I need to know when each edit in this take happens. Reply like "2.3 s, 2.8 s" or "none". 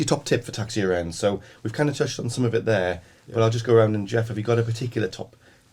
none

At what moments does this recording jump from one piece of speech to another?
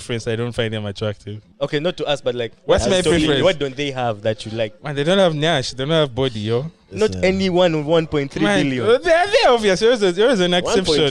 1.4 s, 4.8 s

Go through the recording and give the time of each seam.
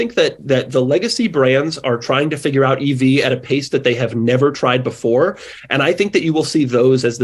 none

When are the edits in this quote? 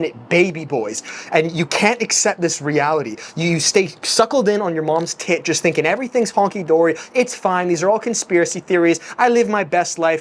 none

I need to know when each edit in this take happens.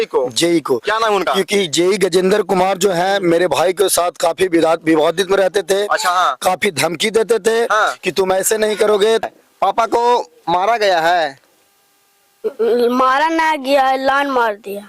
9.2 s

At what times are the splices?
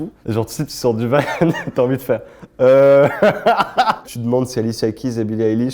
4.1 s

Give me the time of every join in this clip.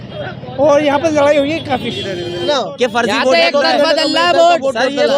2.4 s

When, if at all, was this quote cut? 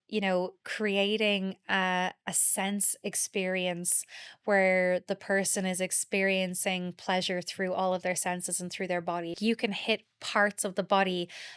9.4 s

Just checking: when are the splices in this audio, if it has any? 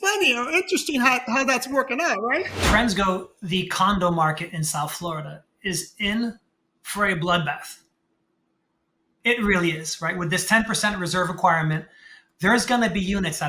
2.6 s

